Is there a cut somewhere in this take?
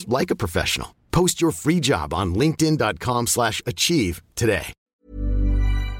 yes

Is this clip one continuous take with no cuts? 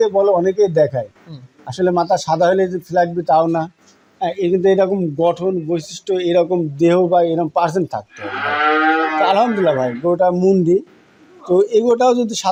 yes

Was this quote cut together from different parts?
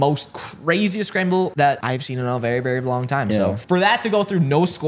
yes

